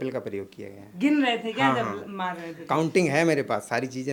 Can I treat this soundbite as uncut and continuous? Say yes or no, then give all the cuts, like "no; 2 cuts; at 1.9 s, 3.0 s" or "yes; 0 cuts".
yes; 0 cuts